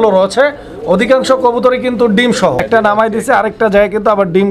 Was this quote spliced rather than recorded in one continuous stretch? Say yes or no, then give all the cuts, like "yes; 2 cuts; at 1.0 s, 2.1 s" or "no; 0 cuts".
yes; 1 cut; at 2.7 s